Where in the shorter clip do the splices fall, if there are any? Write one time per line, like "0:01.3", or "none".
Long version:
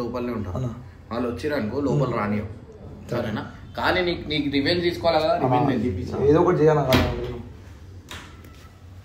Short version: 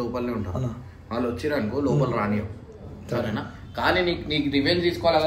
none